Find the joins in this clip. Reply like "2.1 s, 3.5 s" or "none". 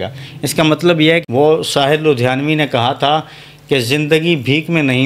1.2 s